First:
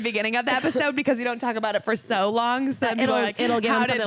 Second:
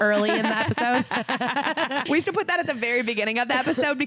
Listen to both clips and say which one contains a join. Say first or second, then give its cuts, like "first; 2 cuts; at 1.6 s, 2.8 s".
second; 1 cut; at 2.1 s